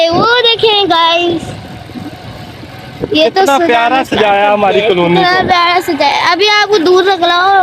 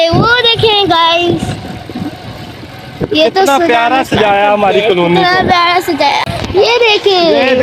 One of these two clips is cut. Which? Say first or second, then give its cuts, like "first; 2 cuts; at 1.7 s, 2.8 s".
second; 1 cut; at 6.3 s